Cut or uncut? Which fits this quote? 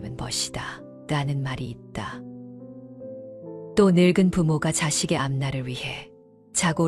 uncut